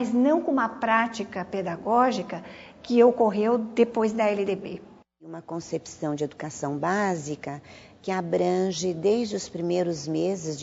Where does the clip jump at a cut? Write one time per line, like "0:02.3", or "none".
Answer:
0:05.4